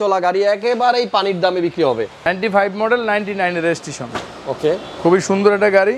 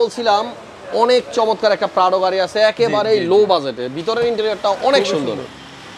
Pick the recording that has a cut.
first; 1 cut; at 2.2 s

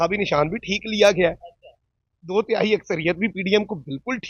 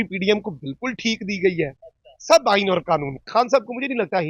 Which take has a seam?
second; 1 cut; at 3.2 s

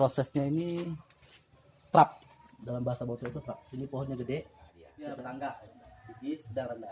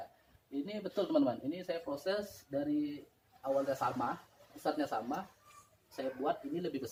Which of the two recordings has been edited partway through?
first; 1 cut; at 4.8 s

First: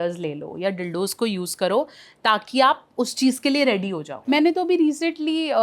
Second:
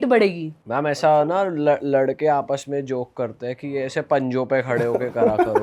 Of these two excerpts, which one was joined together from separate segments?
first; 1 cut; at 4.1 s

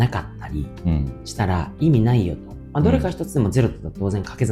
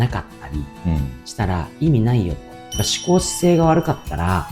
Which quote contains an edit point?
second; 1 cut; at 2.6 s

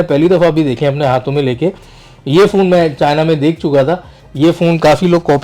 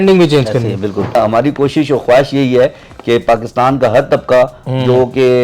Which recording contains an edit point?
second; 1 cut; at 1.2 s

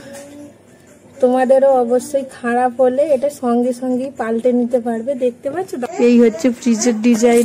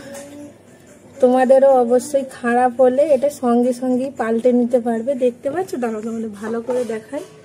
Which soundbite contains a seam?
first; 1 cut; at 5.8 s

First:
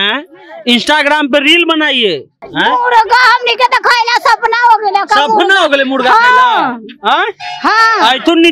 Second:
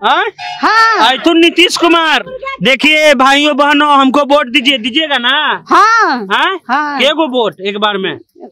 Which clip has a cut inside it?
first; 1 cut; at 2.4 s

